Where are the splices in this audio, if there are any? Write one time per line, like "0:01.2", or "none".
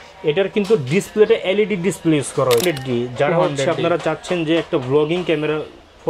0:02.6